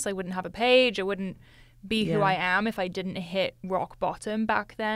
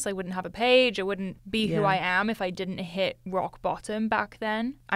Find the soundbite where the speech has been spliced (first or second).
second